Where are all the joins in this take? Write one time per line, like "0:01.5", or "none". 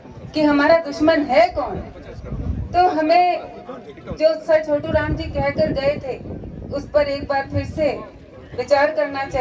none